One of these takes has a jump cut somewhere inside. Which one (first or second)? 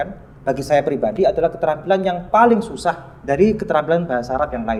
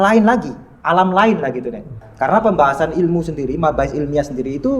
second